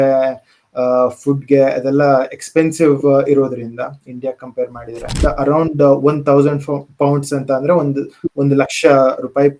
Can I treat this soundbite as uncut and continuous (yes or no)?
no